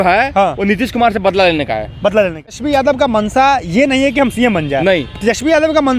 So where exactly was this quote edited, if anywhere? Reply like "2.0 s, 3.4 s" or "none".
2.5 s